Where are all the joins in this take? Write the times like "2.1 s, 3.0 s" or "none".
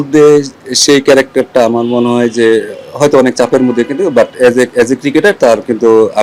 none

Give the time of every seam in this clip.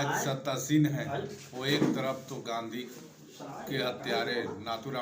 none

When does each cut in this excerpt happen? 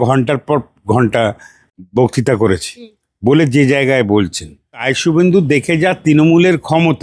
4.8 s

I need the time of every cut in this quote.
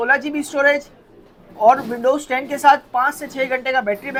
none

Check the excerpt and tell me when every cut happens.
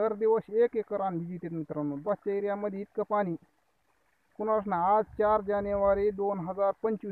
2.0 s

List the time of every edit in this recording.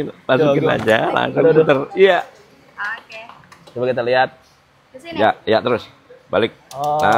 none

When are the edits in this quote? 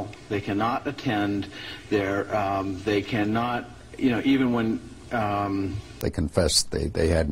6.0 s

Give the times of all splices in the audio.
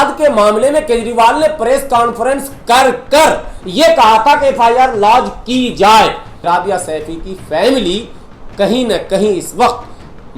6.3 s

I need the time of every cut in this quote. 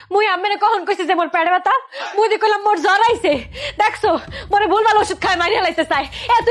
none

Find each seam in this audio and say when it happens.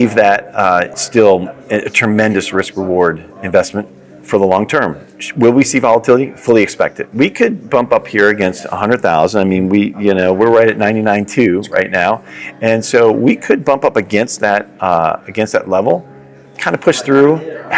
1.0 s

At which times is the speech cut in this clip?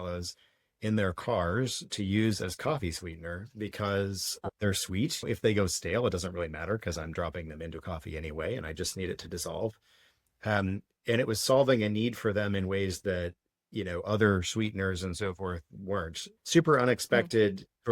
4.3 s

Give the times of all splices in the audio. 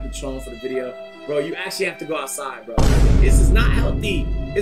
none

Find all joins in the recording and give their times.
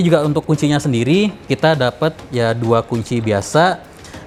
none

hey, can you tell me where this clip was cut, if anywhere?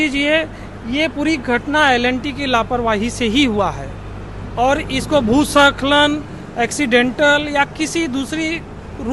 none

